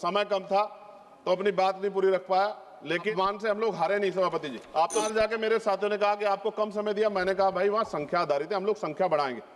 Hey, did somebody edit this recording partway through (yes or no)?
yes